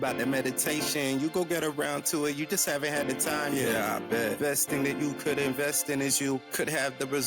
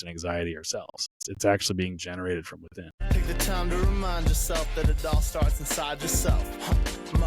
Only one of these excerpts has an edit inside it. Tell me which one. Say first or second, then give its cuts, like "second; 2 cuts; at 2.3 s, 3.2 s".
second; 2 cuts; at 1.2 s, 3.0 s